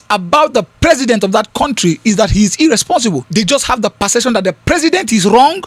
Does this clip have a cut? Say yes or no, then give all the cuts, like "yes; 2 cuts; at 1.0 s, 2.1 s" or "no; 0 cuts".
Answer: yes; 1 cut; at 3.2 s